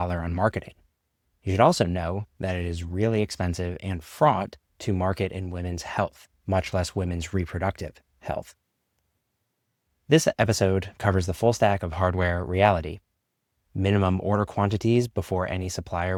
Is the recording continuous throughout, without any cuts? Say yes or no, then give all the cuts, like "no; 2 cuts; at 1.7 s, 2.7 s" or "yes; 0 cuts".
yes; 0 cuts